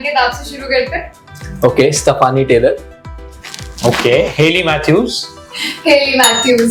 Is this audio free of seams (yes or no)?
yes